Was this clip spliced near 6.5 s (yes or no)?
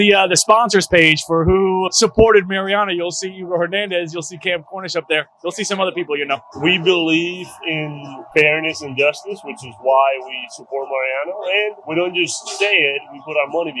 yes